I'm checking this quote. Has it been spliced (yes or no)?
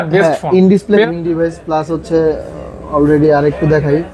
yes